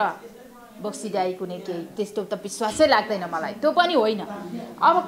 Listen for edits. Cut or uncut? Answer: uncut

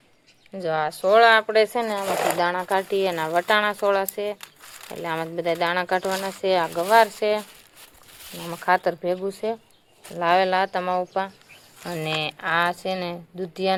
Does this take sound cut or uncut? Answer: uncut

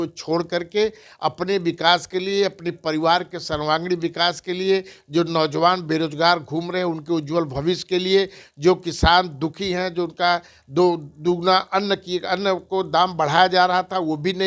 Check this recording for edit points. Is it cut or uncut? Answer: uncut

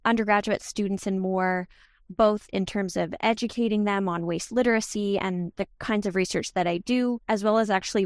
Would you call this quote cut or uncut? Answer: uncut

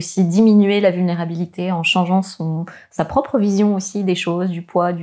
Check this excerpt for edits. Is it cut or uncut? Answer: uncut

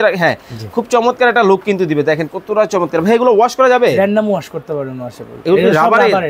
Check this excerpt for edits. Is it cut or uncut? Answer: uncut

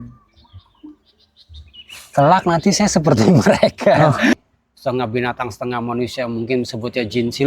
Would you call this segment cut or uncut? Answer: cut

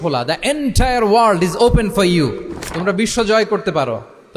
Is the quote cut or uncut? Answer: uncut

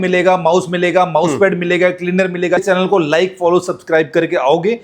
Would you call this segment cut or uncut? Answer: cut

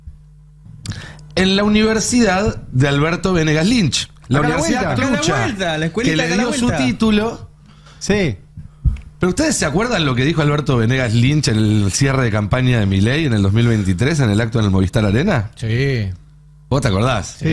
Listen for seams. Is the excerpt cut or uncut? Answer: uncut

